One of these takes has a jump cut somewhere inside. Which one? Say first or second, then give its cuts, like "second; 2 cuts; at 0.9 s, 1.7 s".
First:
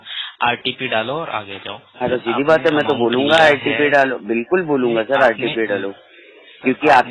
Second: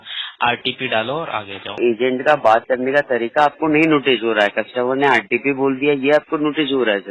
second; 1 cut; at 1.8 s